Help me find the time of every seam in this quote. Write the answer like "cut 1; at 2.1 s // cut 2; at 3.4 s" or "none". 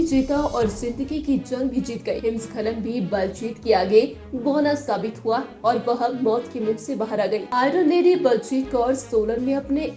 none

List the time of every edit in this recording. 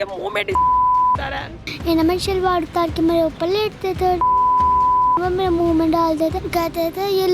cut 1; at 1.7 s // cut 2; at 6.4 s

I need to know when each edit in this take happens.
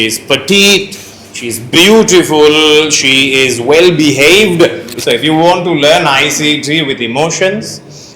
cut 1; at 4.9 s

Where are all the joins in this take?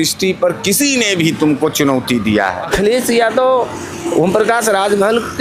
cut 1; at 2.7 s

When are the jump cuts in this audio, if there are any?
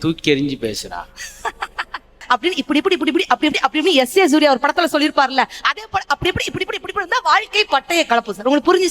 cut 1; at 2.2 s

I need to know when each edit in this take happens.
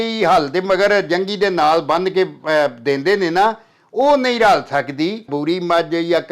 cut 1; at 5.3 s

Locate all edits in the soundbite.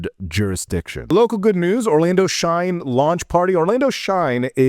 cut 1; at 1.1 s

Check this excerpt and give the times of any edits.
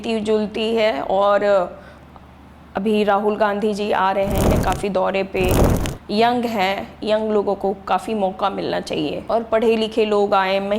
cut 1; at 9.2 s

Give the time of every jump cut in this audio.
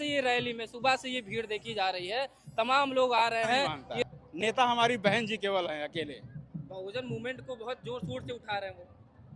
cut 1; at 3.8 s

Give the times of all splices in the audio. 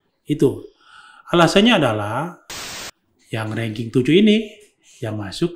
cut 1; at 2.6 s

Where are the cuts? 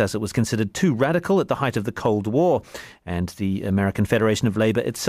cut 1; at 2.6 s

